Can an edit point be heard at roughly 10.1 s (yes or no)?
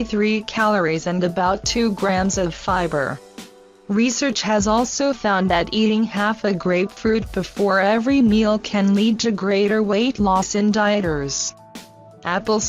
yes